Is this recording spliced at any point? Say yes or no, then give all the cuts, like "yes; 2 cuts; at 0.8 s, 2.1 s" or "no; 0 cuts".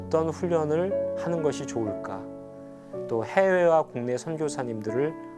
no; 0 cuts